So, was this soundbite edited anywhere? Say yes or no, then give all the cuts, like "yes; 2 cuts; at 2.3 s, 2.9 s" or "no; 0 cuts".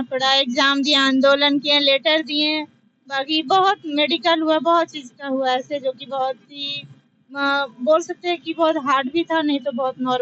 no; 0 cuts